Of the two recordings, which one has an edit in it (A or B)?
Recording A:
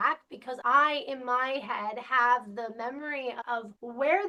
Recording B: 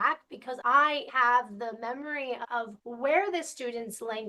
B